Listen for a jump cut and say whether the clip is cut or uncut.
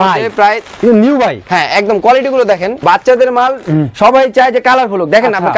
cut